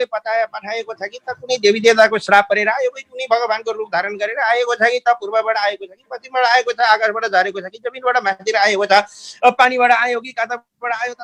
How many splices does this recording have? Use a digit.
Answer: 0